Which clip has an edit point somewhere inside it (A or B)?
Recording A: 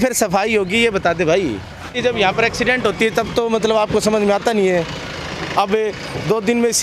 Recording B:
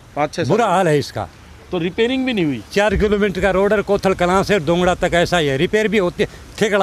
A